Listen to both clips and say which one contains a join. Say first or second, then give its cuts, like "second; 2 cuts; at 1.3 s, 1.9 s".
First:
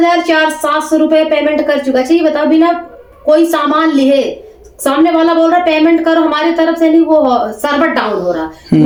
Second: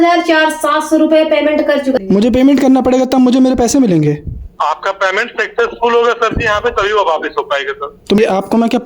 second; 2 cuts; at 2.0 s, 8.2 s